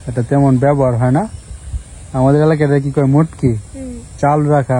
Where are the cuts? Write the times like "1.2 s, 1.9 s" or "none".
none